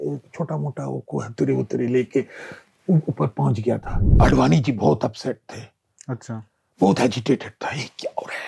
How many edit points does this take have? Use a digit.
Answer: 1